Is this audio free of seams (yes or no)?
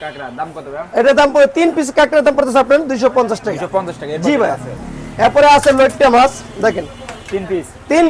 yes